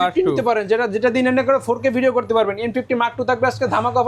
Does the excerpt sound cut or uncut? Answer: uncut